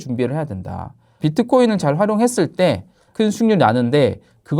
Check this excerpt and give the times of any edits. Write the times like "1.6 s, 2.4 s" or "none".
1.2 s, 3.1 s

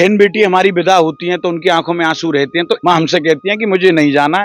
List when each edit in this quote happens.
2.8 s

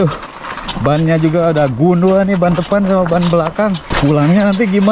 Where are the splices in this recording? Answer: 3.9 s

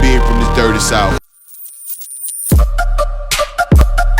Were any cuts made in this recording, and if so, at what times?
1.2 s

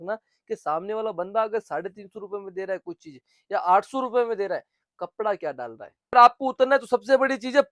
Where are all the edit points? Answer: 6.1 s

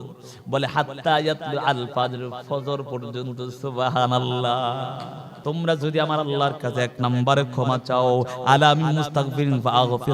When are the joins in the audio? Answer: 5.4 s

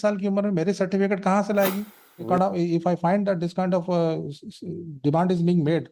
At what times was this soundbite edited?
2.3 s

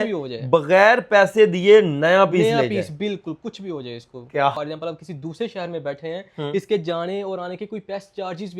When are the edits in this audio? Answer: 4.5 s

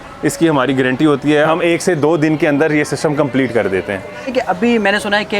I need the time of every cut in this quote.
1.5 s, 4.3 s

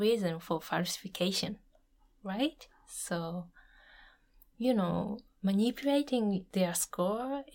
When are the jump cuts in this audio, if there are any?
6.5 s

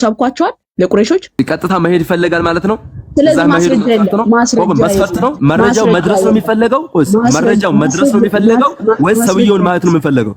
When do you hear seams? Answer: 5.4 s

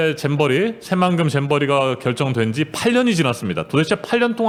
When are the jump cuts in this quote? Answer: none

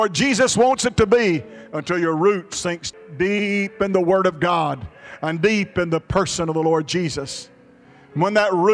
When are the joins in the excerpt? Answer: 2.9 s

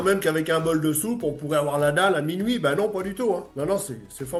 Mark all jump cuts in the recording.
none

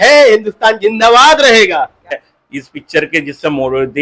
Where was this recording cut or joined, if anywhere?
2.1 s

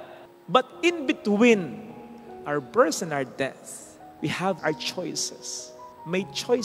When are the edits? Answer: 4.6 s

